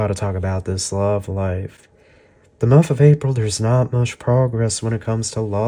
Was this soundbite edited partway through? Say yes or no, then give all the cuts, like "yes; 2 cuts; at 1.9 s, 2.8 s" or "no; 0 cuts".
no; 0 cuts